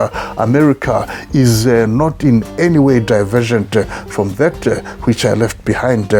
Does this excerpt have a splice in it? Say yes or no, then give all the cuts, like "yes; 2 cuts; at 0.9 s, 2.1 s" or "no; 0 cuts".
no; 0 cuts